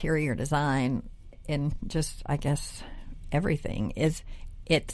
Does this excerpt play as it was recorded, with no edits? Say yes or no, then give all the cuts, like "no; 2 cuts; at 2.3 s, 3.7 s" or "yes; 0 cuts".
no; 1 cut; at 1.4 s